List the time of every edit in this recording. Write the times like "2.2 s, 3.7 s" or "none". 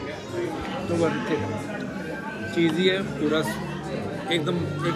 none